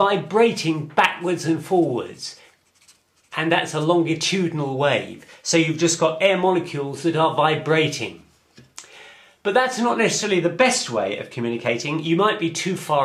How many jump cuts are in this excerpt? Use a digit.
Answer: 0